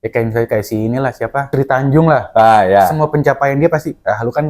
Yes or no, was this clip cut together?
yes